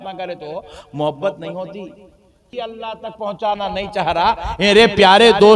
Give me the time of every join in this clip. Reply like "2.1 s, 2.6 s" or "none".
2.5 s